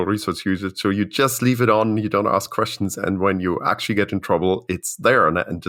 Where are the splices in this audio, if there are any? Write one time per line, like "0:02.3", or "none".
none